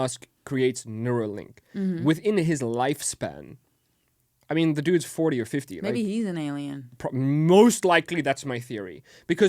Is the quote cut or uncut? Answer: uncut